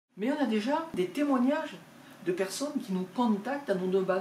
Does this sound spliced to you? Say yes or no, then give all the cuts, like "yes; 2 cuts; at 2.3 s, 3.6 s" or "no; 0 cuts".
yes; 1 cut; at 0.9 s